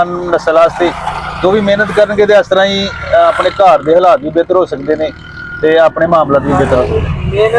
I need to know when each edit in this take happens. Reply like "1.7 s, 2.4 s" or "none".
none